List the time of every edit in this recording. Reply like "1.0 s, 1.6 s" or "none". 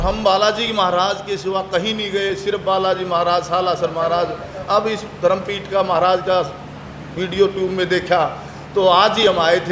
none